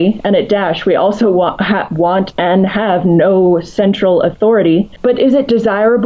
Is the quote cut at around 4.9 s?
yes; 1 cut; at 4.9 s

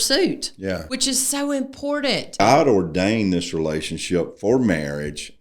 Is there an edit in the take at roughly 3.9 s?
no; 2 cuts; at 0.9 s, 2.4 s

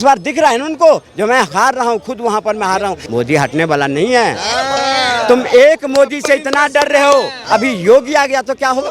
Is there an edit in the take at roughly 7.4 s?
yes; 2 cuts; at 3.0 s, 7.4 s

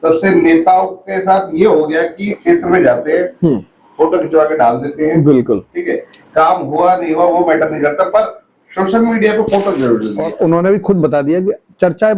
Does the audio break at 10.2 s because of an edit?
yes; 1 cut; at 10.2 s

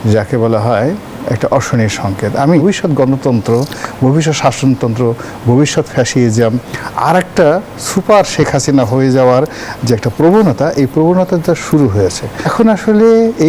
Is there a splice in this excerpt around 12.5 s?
yes; 2 cuts; at 2.6 s, 12.5 s

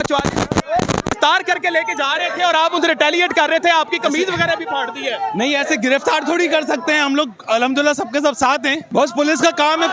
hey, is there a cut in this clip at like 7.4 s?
no; 2 cuts; at 1.1 s, 8.8 s

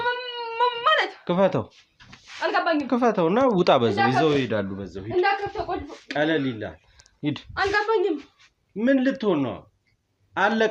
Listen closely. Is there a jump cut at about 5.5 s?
no; 0 cuts

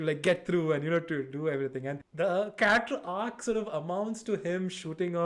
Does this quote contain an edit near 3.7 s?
no; 1 cut; at 2.0 s

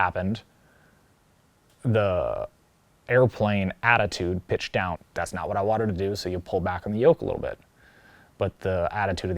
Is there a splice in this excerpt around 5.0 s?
yes; 1 cut; at 5.0 s

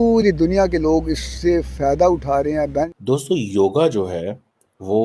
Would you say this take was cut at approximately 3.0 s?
yes; 1 cut; at 3.0 s

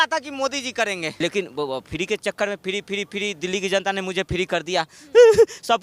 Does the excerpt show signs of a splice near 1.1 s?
yes; 1 cut; at 1.1 s

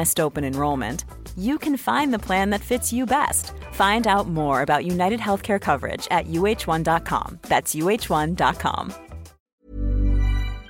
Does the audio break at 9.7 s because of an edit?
yes; 1 cut; at 9.7 s

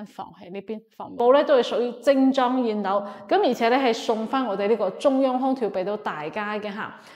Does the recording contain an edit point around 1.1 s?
yes; 1 cut; at 1.1 s

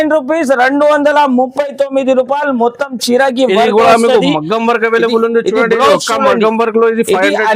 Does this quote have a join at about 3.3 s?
no; 0 cuts

